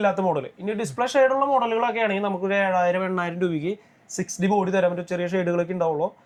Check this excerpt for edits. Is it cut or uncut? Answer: uncut